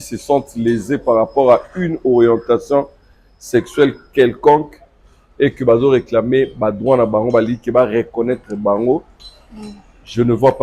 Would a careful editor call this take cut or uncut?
uncut